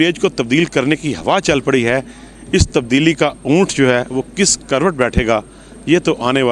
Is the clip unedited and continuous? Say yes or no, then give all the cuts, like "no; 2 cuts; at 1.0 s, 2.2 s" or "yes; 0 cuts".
yes; 0 cuts